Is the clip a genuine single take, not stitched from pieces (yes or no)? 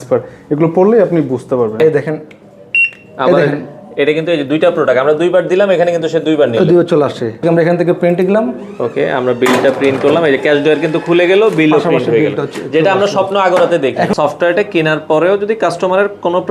no